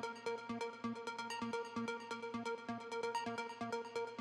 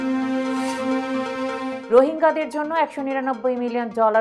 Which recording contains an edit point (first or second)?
second